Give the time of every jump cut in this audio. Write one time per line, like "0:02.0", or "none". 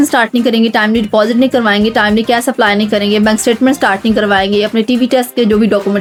none